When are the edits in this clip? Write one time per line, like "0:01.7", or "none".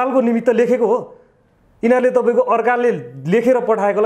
none